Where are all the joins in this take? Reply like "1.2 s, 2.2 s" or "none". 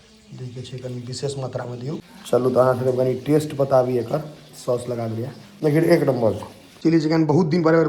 2.1 s, 5.4 s, 6.7 s